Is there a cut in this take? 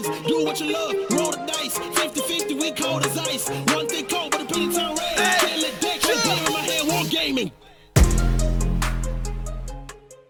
no; 0 cuts

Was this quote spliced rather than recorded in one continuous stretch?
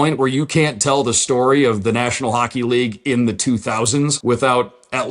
yes; 1 cut; at 4.2 s

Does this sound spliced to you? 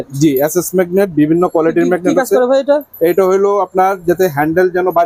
no; 0 cuts

